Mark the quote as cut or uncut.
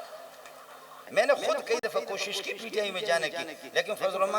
cut